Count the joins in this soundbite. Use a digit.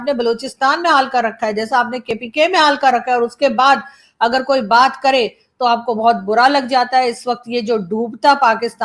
0